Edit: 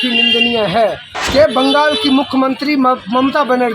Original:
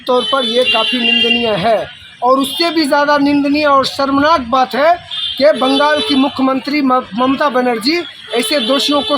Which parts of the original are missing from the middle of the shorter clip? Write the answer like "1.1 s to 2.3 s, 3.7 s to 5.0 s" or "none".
2.0 s to 5.2 s